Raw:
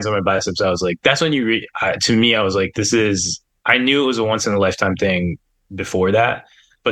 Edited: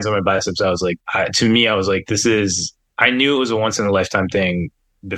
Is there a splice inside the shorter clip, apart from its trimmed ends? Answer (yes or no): yes